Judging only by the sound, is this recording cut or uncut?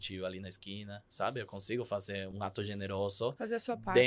cut